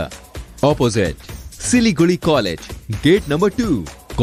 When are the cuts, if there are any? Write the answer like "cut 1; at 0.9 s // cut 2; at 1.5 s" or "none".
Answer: none